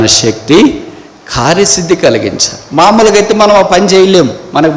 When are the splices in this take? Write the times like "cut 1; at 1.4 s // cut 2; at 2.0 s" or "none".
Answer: none